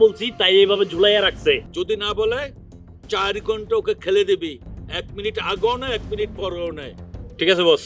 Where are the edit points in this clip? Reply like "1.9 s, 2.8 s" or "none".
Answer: 1.7 s